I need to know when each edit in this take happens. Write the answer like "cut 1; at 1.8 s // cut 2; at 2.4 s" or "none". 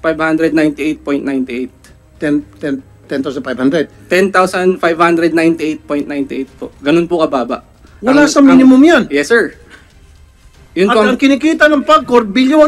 none